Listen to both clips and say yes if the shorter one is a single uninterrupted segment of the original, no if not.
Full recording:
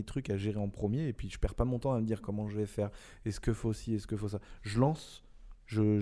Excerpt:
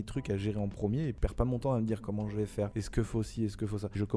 no